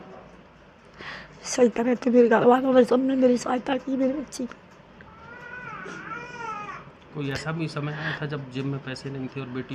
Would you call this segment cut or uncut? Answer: uncut